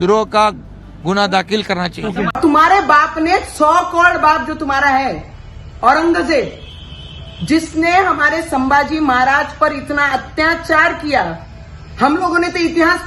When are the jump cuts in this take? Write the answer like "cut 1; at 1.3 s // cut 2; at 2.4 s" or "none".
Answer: cut 1; at 2.4 s